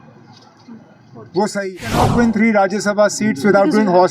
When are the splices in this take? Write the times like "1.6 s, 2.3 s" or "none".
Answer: 2.1 s